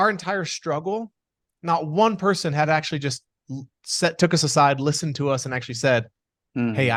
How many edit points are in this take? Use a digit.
0